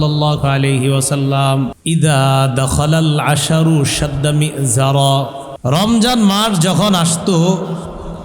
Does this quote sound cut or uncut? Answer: cut